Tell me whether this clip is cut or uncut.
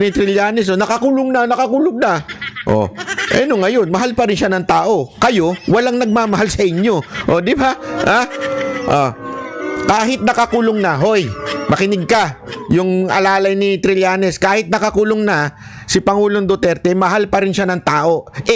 uncut